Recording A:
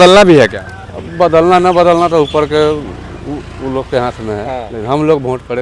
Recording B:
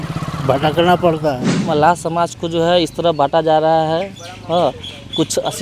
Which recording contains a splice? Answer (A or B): B